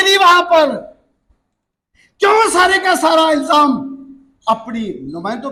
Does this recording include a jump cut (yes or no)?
no